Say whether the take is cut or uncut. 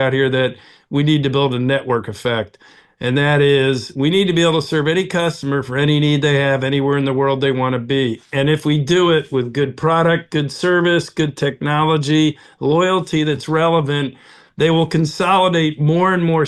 uncut